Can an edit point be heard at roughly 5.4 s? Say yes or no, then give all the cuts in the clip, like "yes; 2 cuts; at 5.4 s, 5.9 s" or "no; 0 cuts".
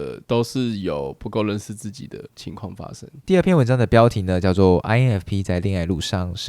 no; 1 cut; at 3.2 s